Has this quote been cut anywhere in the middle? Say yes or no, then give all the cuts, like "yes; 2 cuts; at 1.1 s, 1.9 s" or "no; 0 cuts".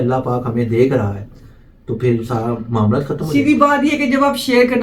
no; 0 cuts